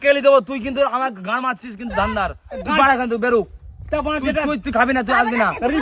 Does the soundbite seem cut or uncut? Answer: uncut